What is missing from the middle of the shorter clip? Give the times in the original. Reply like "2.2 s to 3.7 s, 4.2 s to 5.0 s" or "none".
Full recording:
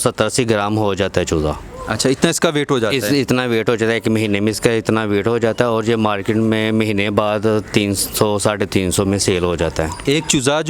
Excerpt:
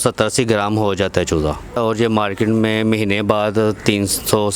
1.8 s to 5.7 s